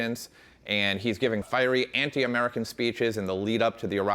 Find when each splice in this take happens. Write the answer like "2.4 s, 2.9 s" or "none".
1.5 s